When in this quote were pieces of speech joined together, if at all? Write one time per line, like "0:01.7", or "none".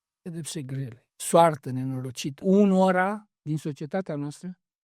0:02.4